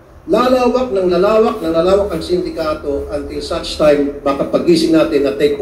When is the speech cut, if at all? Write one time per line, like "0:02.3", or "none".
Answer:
none